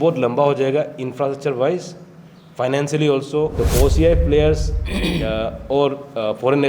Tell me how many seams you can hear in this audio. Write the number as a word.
one